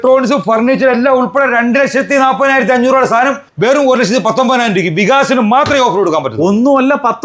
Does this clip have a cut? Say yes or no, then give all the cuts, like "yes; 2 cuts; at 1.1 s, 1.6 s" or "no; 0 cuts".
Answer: no; 0 cuts